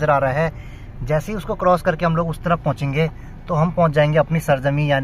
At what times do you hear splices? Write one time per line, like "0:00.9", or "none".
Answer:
none